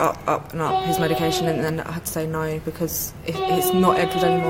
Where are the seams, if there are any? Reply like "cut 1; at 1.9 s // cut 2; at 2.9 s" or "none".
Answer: none